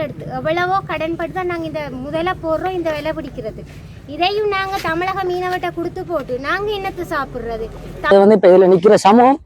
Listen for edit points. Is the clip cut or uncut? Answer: cut